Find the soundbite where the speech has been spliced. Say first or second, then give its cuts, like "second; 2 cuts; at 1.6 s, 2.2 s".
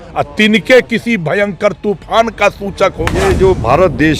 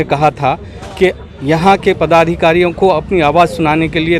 first; 1 cut; at 3.2 s